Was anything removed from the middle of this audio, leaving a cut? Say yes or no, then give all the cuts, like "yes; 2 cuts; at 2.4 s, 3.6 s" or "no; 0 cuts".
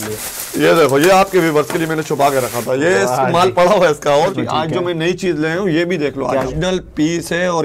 yes; 2 cuts; at 4.3 s, 6.5 s